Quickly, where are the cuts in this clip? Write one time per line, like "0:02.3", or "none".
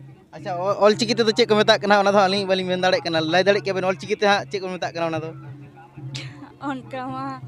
none